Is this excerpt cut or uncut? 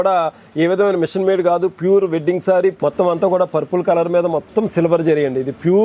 cut